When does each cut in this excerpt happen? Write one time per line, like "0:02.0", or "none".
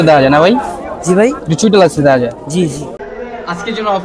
0:03.0